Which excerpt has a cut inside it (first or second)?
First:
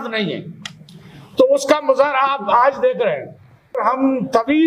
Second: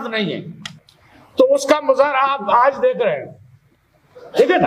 first